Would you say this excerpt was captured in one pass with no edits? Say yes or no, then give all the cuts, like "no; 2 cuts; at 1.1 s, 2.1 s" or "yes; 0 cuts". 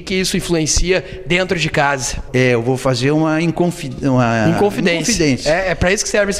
no; 1 cut; at 2.2 s